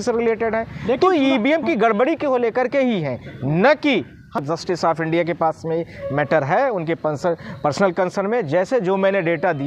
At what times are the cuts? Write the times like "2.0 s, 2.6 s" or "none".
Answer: 4.4 s